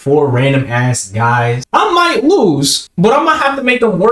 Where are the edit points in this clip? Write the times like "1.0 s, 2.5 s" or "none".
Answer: 1.6 s, 2.8 s